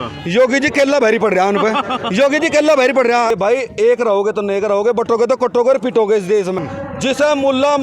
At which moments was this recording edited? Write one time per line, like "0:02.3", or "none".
0:03.3
0:06.6